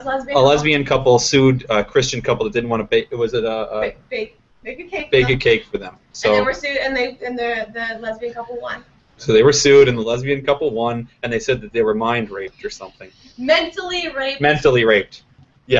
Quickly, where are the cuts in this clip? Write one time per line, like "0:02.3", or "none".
0:10.5